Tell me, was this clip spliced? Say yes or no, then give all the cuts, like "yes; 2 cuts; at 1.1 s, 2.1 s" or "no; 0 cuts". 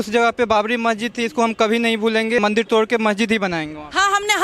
yes; 1 cut; at 2.4 s